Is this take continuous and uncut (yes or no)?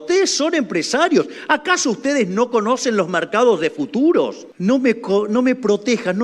no